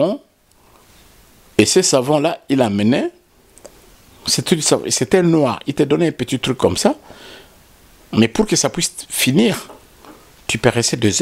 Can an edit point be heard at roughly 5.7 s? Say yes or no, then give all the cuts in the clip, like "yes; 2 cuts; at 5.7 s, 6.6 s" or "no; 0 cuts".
no; 0 cuts